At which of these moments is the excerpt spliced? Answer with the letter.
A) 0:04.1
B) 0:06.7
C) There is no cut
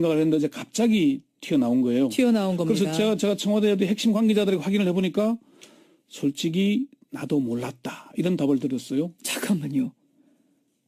B